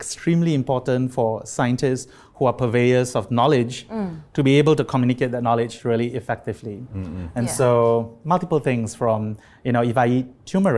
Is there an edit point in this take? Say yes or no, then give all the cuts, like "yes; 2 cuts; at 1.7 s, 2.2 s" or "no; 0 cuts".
no; 0 cuts